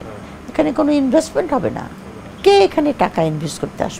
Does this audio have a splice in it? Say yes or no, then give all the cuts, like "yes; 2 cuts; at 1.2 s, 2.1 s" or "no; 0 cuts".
no; 0 cuts